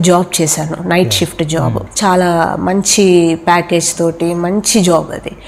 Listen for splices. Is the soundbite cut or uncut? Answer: uncut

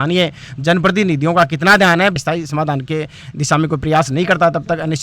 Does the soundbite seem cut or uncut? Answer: cut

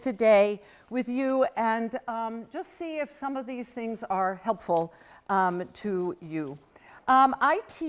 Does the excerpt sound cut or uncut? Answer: cut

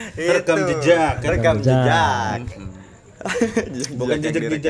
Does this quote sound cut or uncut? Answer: uncut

